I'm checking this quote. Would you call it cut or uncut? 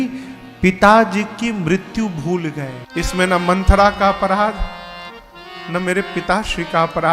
cut